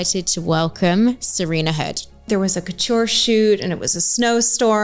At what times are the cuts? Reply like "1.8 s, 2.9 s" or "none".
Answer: 2.3 s